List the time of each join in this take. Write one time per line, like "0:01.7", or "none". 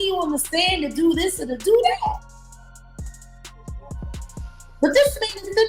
0:02.2
0:04.5